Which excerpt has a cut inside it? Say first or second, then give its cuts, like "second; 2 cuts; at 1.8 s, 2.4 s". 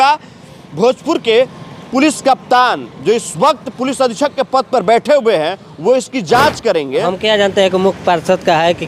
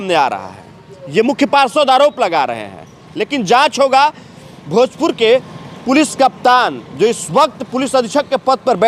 first; 1 cut; at 6.9 s